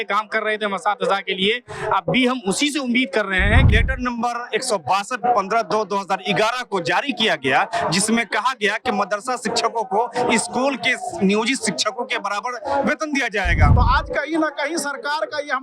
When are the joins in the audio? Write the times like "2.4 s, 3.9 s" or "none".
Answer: 3.7 s, 13.7 s